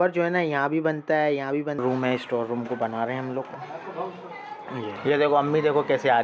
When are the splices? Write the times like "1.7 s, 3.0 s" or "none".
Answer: 1.8 s, 5.0 s